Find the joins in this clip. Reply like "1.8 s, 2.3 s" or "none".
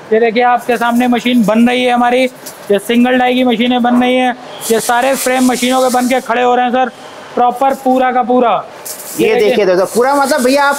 none